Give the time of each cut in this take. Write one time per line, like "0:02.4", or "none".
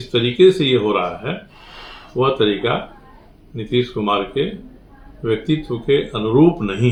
none